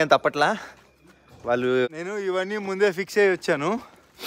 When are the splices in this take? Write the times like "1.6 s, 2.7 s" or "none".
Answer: 1.9 s

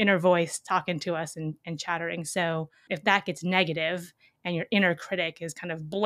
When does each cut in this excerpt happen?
2.8 s

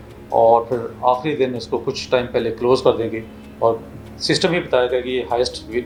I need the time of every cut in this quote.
none

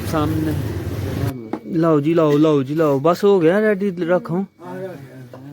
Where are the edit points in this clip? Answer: 1.2 s

